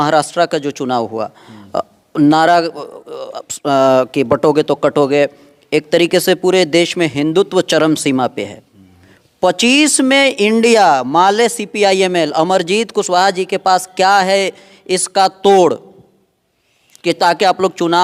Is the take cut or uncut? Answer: uncut